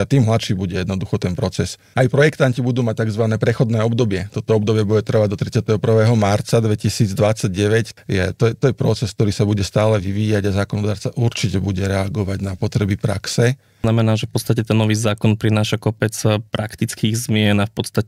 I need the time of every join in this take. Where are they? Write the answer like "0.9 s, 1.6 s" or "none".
1.8 s, 7.9 s, 13.8 s